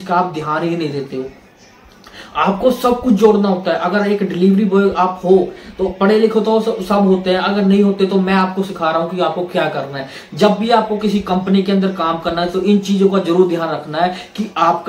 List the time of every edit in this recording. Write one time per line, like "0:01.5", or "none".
none